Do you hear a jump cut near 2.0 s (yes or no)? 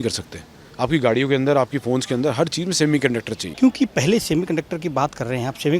no